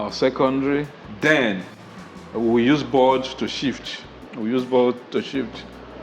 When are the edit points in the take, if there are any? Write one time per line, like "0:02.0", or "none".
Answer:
none